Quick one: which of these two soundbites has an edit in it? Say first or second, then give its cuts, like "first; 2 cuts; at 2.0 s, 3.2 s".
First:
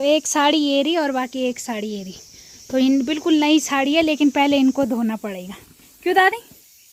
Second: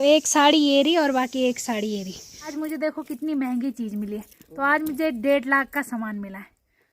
second; 1 cut; at 2.6 s